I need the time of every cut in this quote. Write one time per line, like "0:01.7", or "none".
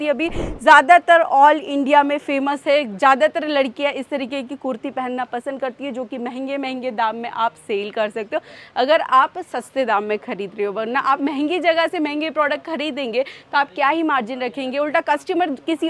none

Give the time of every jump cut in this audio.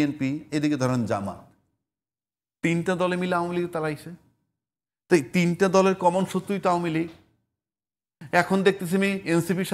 none

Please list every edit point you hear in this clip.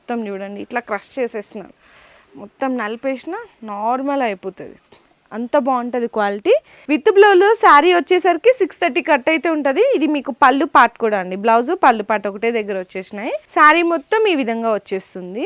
0:06.7
0:13.5

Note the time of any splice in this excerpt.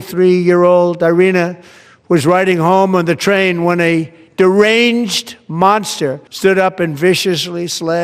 0:06.2

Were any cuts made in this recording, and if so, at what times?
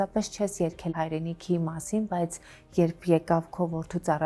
0:00.9

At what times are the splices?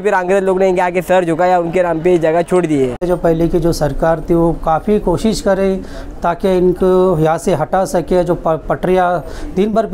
0:03.0

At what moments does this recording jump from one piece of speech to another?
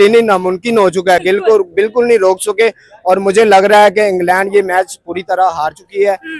none

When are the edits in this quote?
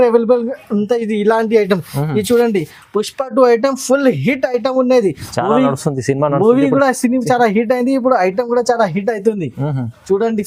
none

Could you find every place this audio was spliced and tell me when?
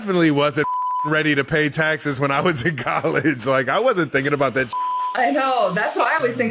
0:04.9

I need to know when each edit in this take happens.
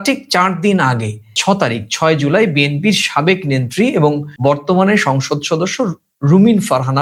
none

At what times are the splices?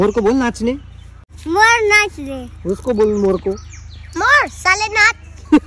0:01.3

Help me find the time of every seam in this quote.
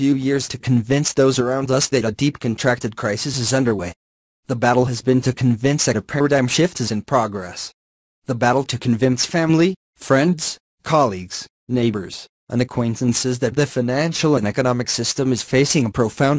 0:04.6

